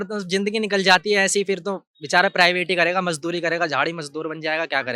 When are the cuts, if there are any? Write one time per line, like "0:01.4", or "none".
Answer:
none